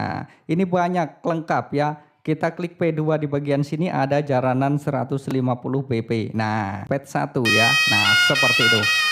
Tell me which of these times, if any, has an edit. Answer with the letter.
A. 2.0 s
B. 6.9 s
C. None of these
B